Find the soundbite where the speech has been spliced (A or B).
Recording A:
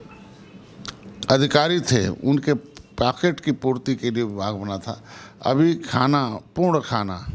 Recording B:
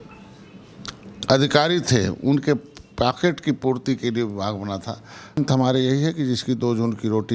B